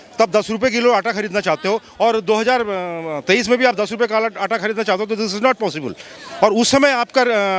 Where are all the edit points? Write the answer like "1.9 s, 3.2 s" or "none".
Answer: none

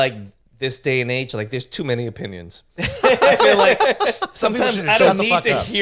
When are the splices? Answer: none

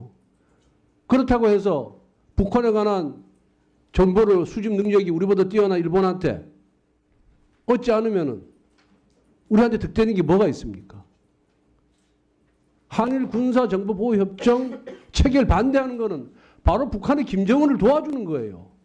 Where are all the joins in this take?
4.1 s

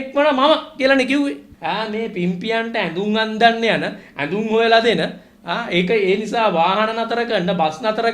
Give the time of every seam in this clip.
1.5 s

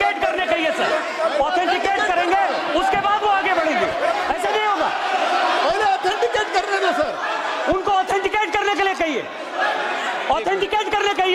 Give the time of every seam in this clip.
none

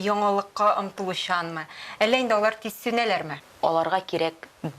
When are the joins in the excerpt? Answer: 3.4 s

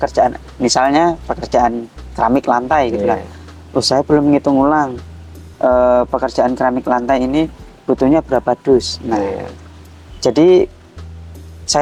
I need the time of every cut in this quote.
none

